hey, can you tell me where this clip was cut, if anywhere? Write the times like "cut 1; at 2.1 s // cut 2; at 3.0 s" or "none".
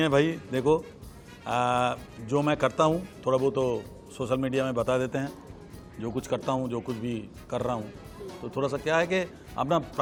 none